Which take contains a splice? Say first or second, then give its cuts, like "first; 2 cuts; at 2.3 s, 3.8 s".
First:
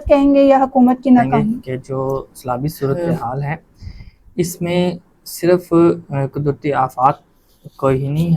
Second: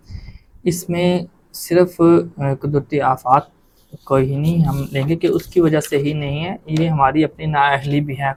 first; 1 cut; at 1.6 s